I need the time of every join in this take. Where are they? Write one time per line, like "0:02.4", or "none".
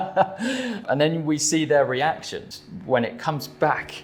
0:00.8
0:02.4